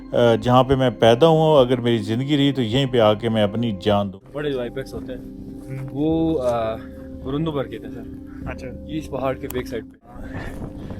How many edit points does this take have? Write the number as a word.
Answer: two